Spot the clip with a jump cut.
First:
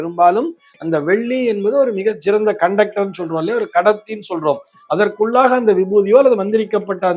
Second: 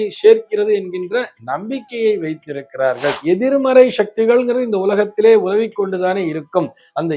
second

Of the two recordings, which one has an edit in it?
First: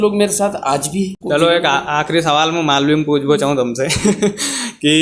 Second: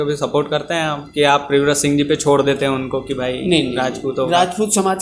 first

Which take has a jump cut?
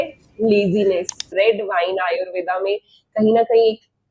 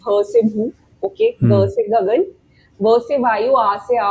first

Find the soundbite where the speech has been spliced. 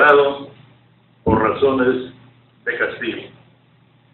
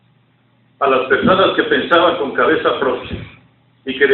second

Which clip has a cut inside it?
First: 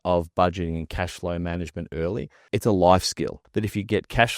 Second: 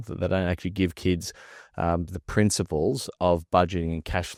first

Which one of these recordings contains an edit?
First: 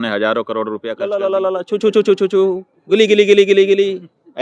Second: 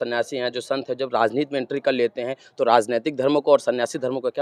first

